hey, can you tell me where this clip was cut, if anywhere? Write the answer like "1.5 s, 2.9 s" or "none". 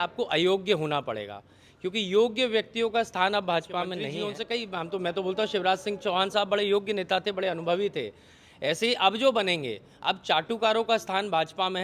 4.1 s